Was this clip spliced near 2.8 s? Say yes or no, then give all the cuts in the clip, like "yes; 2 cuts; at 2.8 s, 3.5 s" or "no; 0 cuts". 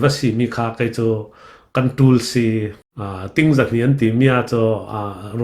yes; 1 cut; at 2.8 s